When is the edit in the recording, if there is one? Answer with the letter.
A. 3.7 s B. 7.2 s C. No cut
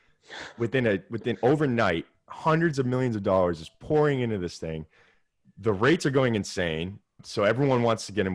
B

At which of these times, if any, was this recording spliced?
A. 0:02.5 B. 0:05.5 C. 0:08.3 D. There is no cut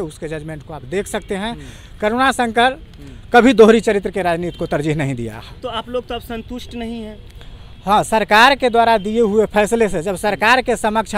D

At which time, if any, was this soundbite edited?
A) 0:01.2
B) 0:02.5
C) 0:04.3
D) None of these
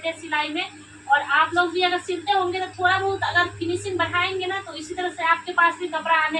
D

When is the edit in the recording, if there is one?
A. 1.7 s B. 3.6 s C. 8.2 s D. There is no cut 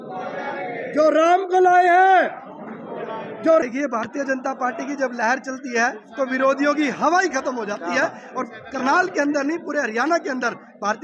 B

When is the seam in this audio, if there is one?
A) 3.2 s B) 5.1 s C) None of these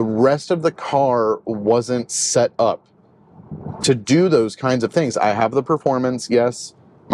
C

